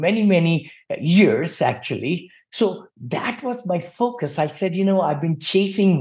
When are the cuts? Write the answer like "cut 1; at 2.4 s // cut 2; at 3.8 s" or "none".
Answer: cut 1; at 2.3 s